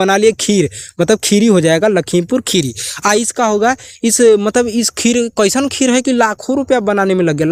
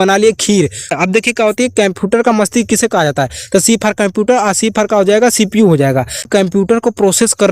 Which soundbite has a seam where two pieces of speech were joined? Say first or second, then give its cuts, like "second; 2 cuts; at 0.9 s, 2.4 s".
second; 2 cuts; at 0.9 s, 6.3 s